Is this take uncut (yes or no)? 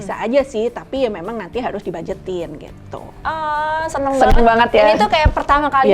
no